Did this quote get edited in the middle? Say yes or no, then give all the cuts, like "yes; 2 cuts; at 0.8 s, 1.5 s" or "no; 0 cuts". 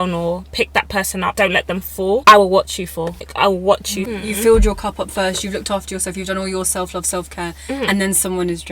yes; 4 cuts; at 1.3 s, 2.2 s, 3.2 s, 4.1 s